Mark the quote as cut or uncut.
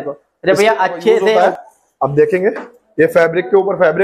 cut